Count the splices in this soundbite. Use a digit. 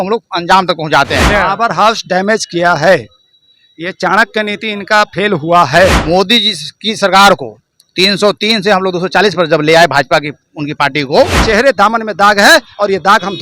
3